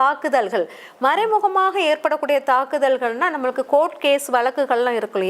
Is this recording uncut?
yes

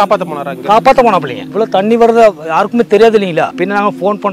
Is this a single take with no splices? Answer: no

